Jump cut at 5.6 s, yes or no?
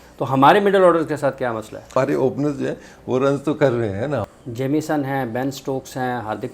no